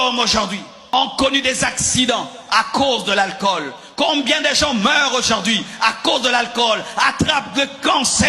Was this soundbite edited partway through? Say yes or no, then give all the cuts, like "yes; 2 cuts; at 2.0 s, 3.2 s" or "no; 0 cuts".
yes; 1 cut; at 0.9 s